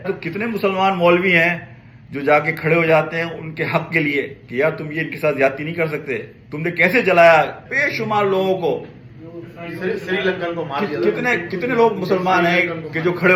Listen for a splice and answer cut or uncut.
uncut